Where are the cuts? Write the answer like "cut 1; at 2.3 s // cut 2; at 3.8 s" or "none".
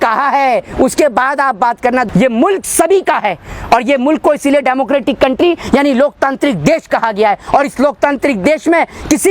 cut 1; at 2.1 s